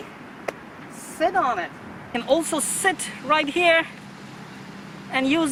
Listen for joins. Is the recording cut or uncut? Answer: uncut